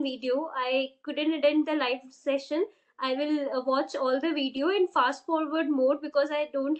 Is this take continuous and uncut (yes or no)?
yes